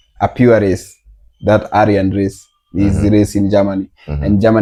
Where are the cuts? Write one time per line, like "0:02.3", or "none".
none